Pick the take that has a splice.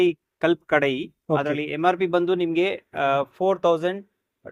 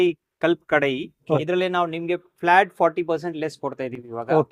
second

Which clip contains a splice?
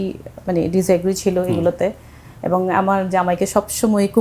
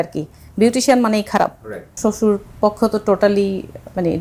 second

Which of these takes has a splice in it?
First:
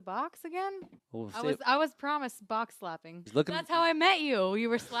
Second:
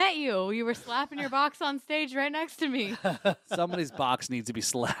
first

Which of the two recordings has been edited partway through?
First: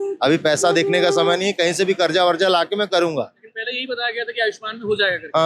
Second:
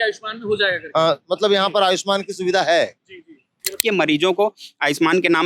second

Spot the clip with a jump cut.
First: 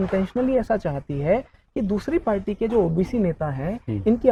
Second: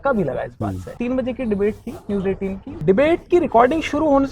second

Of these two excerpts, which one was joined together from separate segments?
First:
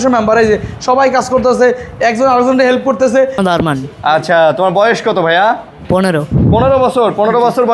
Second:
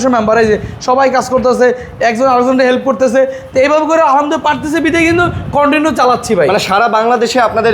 first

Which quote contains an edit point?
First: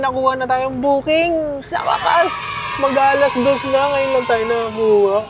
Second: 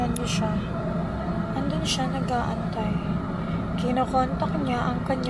first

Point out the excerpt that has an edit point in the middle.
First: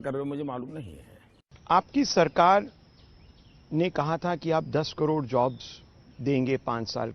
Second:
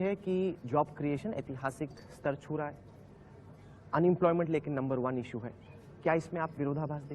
first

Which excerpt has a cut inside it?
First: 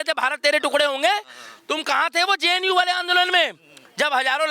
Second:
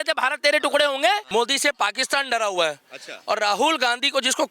second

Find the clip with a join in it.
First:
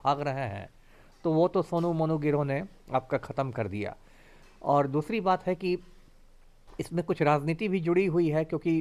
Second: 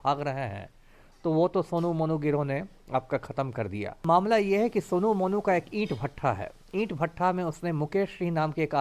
second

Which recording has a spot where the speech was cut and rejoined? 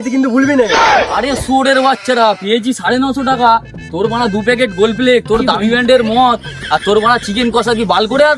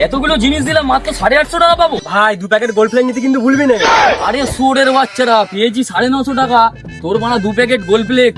second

